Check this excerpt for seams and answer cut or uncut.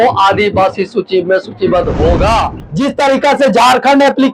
cut